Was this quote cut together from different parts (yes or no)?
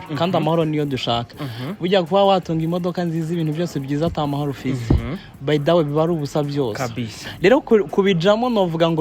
no